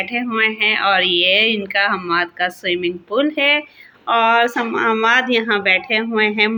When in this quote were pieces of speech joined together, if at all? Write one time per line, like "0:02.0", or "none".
none